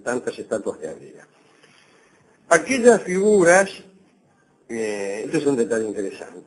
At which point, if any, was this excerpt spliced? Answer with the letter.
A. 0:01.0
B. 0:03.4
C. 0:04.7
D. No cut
B